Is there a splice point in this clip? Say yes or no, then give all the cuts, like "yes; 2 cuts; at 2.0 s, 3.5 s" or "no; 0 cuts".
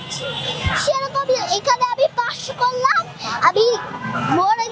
no; 0 cuts